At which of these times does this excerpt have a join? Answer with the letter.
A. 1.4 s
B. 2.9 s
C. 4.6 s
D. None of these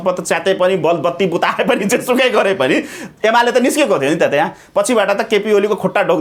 D